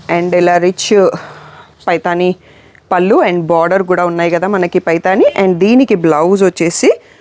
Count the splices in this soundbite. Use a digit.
0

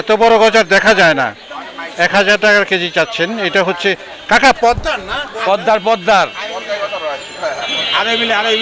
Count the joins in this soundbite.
0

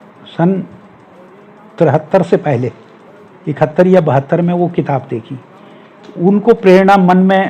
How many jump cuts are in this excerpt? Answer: 0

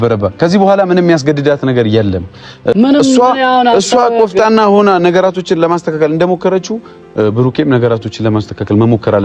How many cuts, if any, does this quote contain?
1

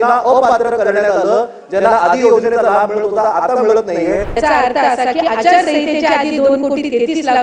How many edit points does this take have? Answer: 1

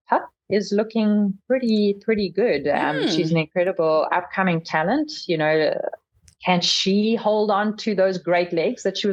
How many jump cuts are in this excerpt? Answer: 0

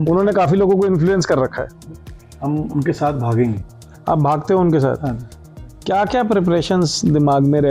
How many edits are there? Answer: 2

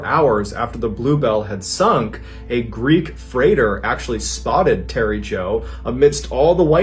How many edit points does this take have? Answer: 0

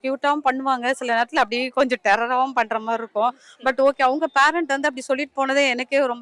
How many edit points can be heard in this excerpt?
0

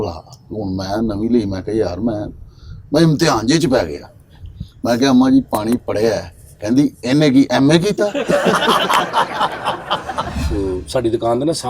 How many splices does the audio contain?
1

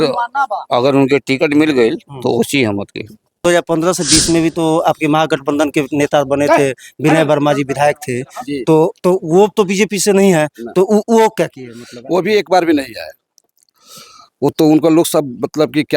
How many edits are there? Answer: 1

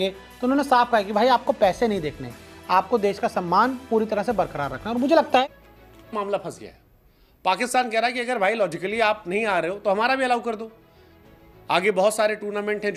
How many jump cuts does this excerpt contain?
1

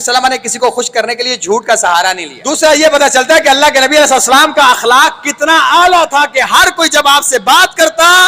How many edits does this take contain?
1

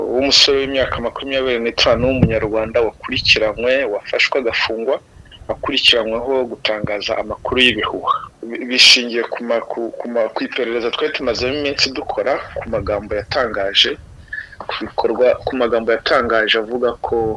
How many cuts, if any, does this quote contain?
1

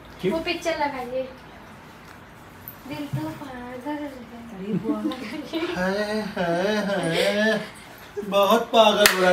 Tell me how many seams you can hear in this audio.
0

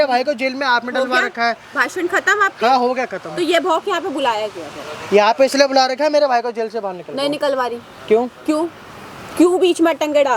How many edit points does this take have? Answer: 0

